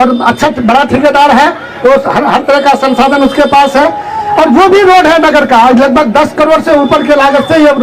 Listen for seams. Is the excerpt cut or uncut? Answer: uncut